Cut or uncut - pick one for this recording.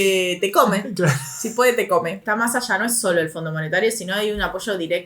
cut